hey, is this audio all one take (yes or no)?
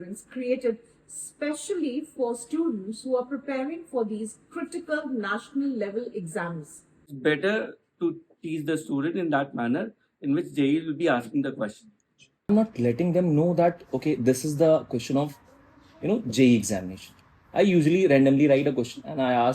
no